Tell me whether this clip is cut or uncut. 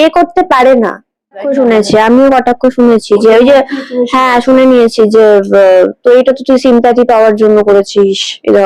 cut